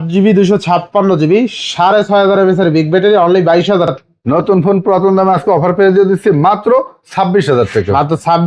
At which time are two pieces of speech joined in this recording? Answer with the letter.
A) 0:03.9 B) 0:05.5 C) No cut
A